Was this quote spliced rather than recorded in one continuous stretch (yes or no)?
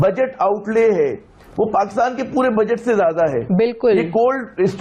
no